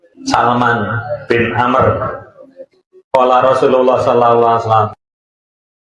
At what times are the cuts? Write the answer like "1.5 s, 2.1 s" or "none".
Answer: none